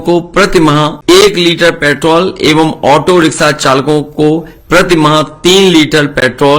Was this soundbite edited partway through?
yes; 1 cut; at 1.0 s

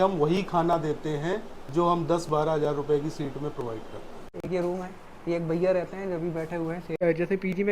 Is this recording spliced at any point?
yes; 2 cuts; at 4.3 s, 7.0 s

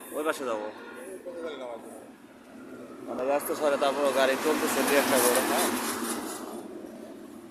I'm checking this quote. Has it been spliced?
no; 0 cuts

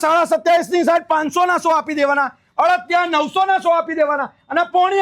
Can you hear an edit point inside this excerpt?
no; 0 cuts

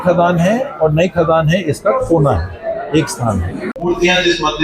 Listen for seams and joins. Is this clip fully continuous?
no; 1 cut; at 3.7 s

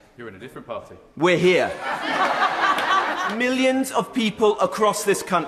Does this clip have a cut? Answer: yes; 1 cut; at 3.3 s

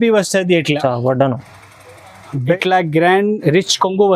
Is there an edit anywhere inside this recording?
yes; 1 cut; at 2.6 s

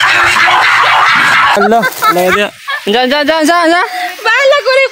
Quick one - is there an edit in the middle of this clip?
no; 0 cuts

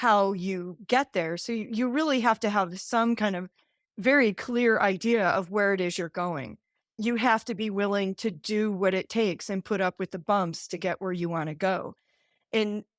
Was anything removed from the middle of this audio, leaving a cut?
yes; 1 cut; at 7.0 s

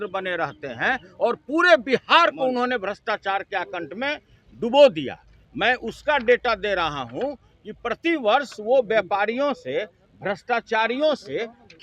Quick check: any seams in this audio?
no; 0 cuts

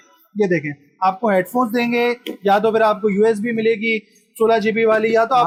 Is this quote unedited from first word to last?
yes; 0 cuts

